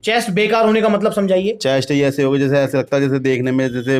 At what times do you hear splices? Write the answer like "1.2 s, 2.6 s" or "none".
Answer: none

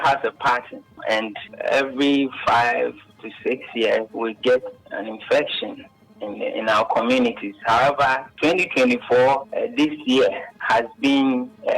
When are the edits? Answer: 1.0 s, 4.1 s

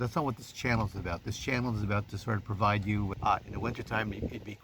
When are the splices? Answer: 3.1 s

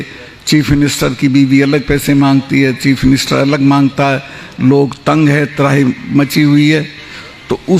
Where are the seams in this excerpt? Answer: none

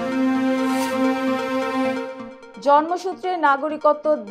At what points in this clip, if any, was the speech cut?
none

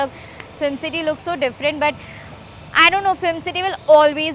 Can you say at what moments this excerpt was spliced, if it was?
none

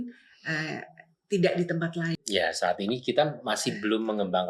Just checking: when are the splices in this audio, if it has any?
2.1 s

